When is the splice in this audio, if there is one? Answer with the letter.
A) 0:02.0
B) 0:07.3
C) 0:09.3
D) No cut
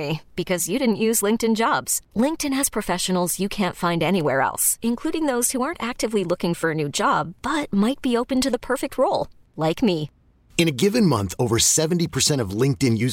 D